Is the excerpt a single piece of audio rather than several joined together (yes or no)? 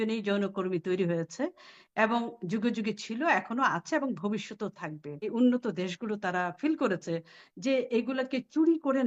no